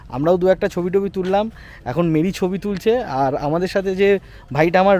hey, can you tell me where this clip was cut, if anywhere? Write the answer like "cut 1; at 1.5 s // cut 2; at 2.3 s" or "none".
none